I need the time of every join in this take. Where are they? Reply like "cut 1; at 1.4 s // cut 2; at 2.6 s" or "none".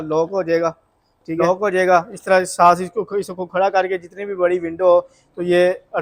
cut 1; at 1.4 s